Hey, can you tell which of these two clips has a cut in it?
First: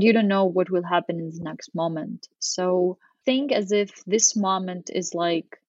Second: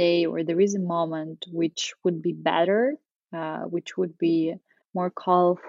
first; 1 cut; at 3.1 s

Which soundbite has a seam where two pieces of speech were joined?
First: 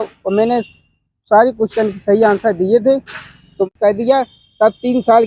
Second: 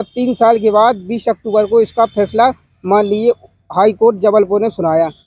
first; 1 cut; at 3.7 s

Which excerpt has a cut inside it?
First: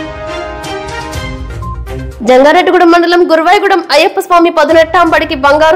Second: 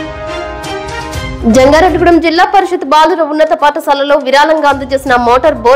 second; 1 cut; at 1.3 s

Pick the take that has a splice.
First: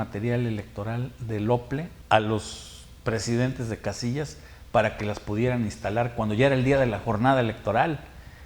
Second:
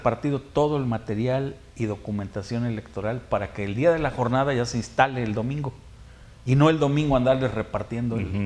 first; 1 cut; at 1.9 s

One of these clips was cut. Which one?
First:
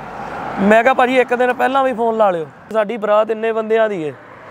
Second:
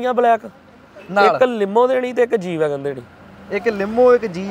first; 1 cut; at 2.7 s

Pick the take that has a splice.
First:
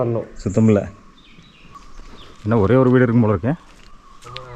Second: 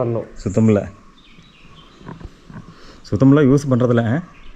first; 1 cut; at 1.9 s

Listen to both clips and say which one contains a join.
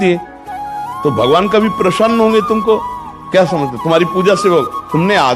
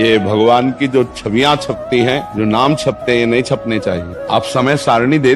second; 2 cuts; at 2.3 s, 4.1 s

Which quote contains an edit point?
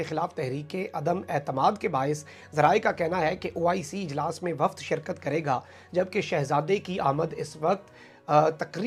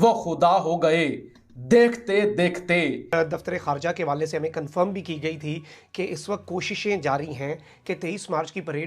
second; 1 cut; at 3.0 s

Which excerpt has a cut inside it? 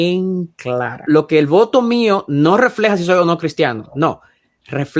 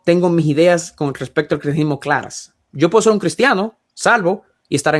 first; 1 cut; at 1.0 s

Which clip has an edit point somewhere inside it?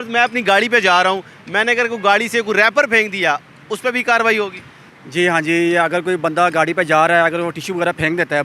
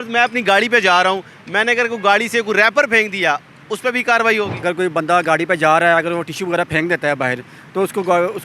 second; 1 cut; at 4.6 s

